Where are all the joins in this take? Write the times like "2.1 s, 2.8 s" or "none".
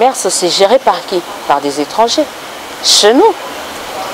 none